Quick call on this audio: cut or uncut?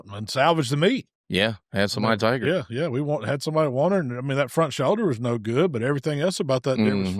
uncut